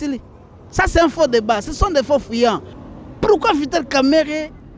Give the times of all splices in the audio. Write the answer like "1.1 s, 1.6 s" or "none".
2.7 s